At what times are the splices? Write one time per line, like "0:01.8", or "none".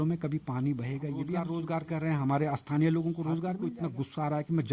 0:01.5
0:03.6

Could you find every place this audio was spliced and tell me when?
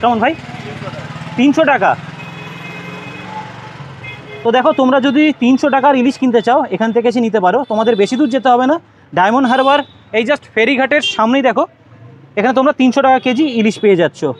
none

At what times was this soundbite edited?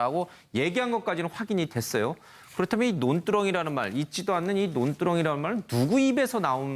0:04.7

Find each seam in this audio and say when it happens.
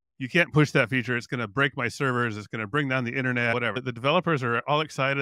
0:03.8

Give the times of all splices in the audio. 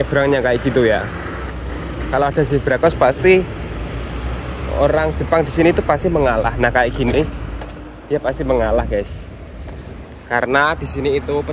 none

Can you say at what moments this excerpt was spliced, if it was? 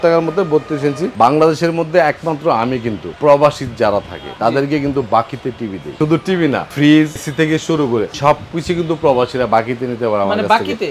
0:01.1
0:03.0
0:04.2
0:05.8
0:07.8

